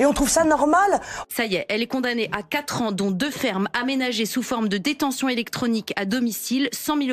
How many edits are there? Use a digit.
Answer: 1